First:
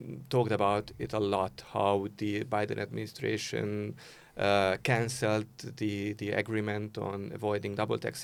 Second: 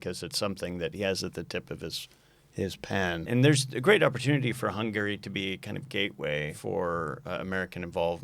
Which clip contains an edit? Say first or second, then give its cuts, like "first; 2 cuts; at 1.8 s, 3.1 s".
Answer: second; 2 cuts; at 3.2 s, 6.6 s